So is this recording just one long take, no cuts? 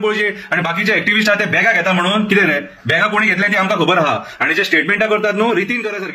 yes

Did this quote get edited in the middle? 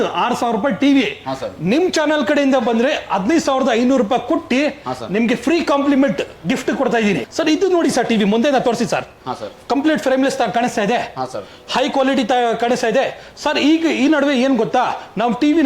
no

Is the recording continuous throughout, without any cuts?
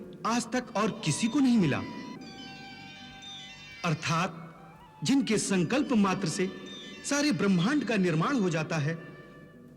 yes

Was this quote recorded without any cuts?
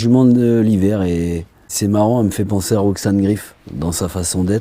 no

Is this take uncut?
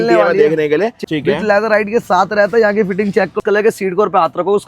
no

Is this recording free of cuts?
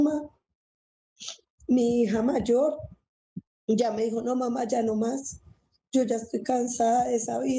yes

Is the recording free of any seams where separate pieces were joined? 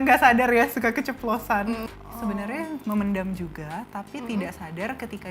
no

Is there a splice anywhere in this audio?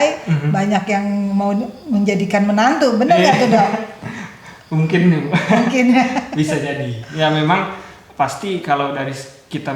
no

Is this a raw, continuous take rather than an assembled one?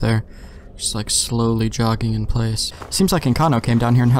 no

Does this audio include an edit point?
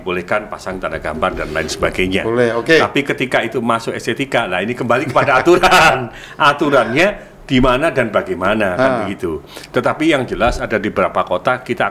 no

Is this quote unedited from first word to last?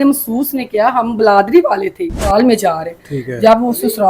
no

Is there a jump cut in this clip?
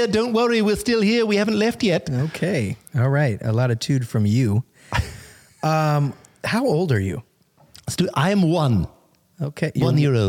no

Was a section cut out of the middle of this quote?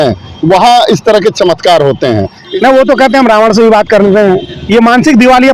yes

